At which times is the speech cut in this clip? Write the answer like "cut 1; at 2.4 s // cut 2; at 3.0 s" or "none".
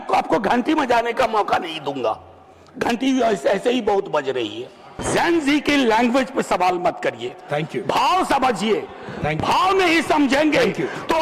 cut 1; at 4.9 s